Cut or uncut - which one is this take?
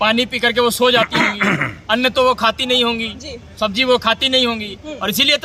uncut